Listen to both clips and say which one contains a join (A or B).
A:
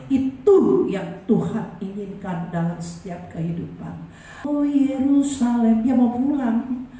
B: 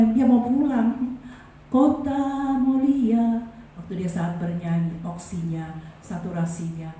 A